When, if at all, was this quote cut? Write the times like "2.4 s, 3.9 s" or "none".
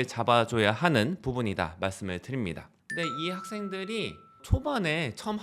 2.7 s, 4.4 s

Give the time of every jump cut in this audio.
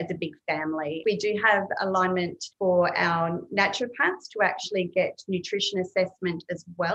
1.0 s, 2.4 s

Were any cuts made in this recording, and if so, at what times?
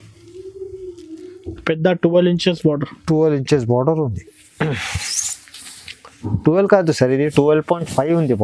none

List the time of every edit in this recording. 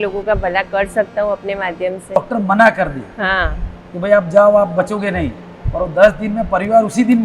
2.2 s

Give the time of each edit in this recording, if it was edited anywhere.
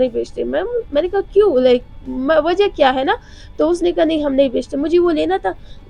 none

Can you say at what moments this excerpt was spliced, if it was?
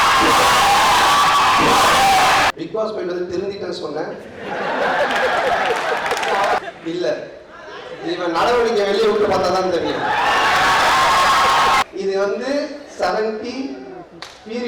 2.5 s, 6.6 s, 11.8 s

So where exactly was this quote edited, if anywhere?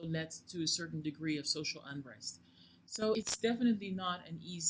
3.2 s

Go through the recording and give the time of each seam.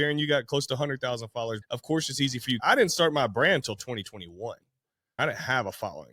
1.6 s, 2.6 s, 5.2 s

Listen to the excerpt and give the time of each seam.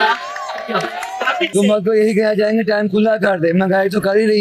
1.5 s

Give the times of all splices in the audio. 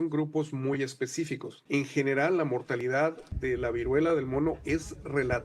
1.5 s

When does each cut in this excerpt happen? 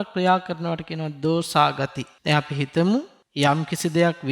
2.1 s, 3.2 s

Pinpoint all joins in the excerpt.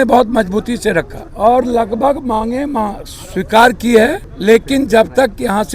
1.2 s, 4.3 s

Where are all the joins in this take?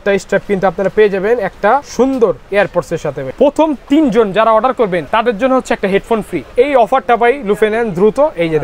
1.9 s, 3.3 s, 5.1 s, 6.4 s

